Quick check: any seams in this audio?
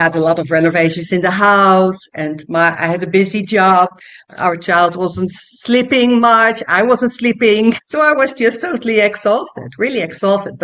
yes; 1 cut; at 4.2 s

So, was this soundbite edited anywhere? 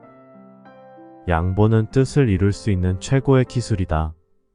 no; 0 cuts

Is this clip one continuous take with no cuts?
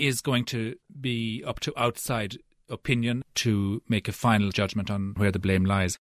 no; 2 cuts; at 3.2 s, 5.1 s

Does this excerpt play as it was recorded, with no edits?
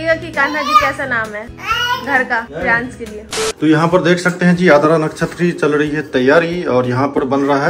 yes; 0 cuts

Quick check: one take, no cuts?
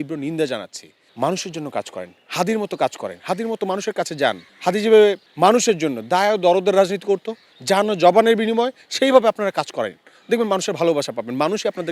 no; 3 cuts; at 1.0 s, 4.5 s, 5.3 s

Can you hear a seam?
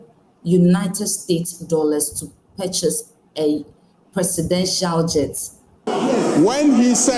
yes; 1 cut; at 5.9 s

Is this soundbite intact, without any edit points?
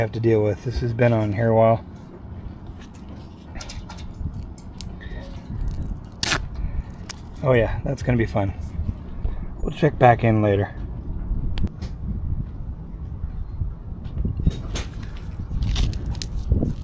yes; 0 cuts

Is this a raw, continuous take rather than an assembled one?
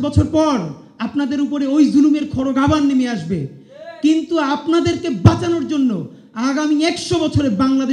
yes; 0 cuts

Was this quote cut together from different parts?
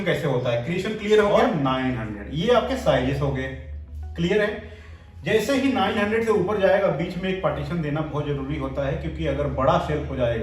yes; 1 cut; at 1.3 s

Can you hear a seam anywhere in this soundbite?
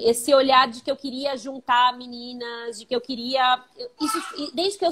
no; 0 cuts

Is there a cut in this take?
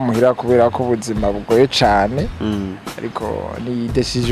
no; 0 cuts

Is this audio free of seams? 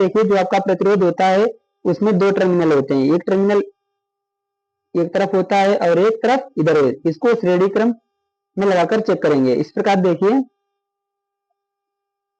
yes; 0 cuts

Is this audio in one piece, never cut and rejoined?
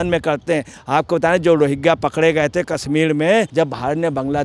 no; 1 cut; at 3.5 s

